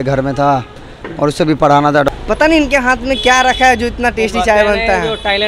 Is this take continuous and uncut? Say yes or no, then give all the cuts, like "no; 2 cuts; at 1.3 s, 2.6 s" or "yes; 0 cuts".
no; 1 cut; at 2.1 s